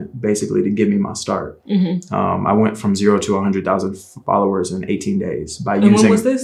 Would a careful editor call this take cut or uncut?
uncut